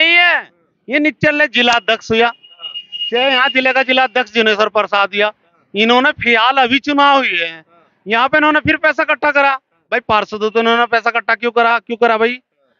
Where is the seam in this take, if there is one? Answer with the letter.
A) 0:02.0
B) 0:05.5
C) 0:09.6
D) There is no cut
D